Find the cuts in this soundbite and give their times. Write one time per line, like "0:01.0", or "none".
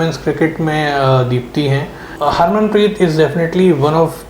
0:02.1

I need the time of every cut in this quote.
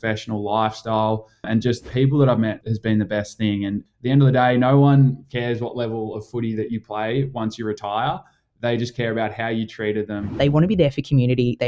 0:01.5
0:02.7
0:03.8
0:10.3

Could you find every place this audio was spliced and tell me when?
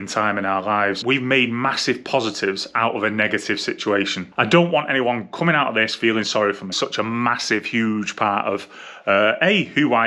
0:01.0
0:04.2
0:06.7

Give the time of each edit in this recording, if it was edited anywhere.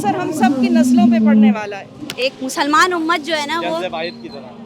0:02.0

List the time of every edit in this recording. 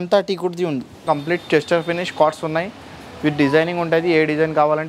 0:01.0

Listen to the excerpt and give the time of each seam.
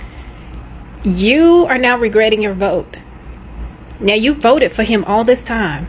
none

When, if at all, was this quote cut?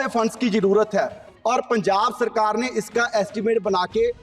0:01.2

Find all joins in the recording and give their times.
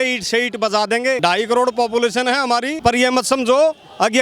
0:01.2
0:02.7

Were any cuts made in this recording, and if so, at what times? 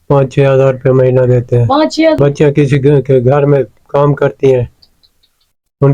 0:02.2

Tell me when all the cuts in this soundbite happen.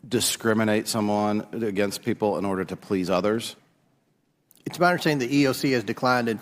0:03.5

